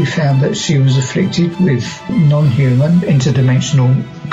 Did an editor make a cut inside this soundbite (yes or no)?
yes